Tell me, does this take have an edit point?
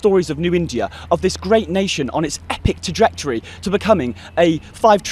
no; 0 cuts

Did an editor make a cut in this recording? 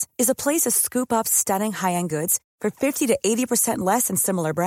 no; 0 cuts

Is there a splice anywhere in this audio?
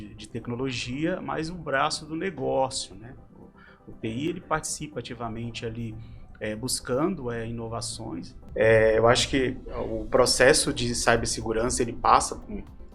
yes; 1 cut; at 8.4 s

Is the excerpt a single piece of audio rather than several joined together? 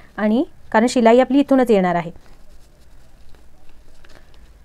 yes; 0 cuts

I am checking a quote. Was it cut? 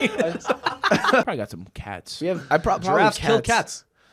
yes; 1 cut; at 1.2 s

